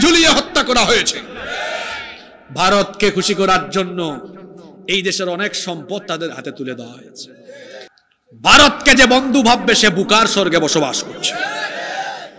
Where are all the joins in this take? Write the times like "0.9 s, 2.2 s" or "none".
7.9 s